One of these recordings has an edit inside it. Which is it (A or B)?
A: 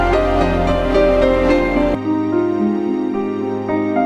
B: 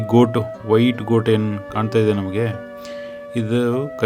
A